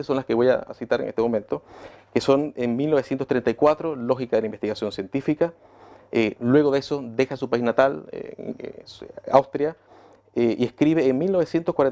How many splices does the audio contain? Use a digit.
0